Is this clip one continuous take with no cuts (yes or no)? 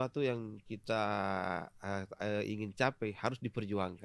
yes